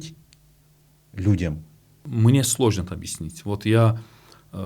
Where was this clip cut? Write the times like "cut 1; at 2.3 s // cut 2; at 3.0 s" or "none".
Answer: cut 1; at 2.0 s